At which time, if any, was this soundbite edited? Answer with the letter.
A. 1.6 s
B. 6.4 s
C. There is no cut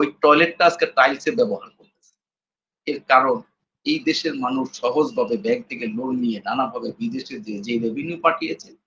C